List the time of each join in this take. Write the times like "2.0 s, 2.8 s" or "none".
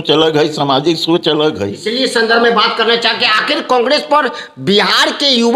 1.8 s